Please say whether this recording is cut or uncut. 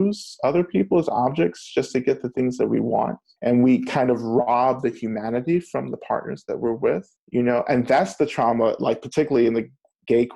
cut